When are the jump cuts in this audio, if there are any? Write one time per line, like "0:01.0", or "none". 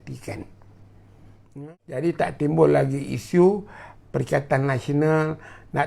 0:01.5